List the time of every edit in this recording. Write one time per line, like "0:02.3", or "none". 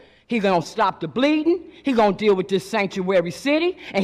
none